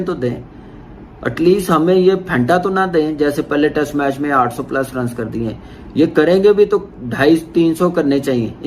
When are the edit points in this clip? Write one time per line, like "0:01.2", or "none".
0:05.7